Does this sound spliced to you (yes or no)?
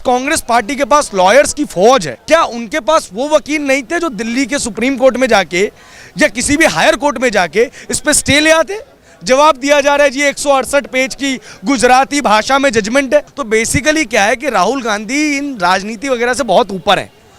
yes